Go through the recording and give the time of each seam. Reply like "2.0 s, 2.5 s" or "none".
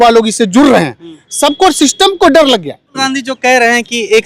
3.1 s